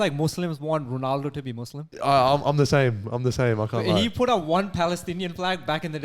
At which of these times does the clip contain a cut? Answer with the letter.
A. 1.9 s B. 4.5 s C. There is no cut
A